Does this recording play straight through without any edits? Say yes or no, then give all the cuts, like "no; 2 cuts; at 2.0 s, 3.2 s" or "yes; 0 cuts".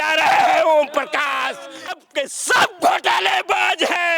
no; 1 cut; at 1.9 s